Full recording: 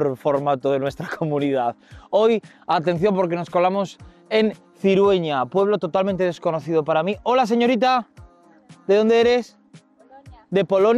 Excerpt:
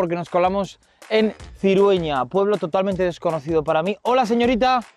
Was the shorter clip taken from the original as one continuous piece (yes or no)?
yes